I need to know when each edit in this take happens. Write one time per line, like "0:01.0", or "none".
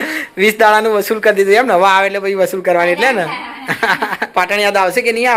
0:04.3